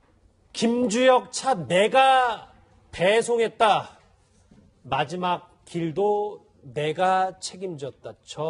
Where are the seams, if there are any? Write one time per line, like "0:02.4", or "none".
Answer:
none